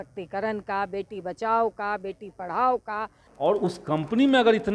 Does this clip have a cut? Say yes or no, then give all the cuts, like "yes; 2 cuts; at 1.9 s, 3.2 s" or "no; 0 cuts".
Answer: yes; 1 cut; at 3.2 s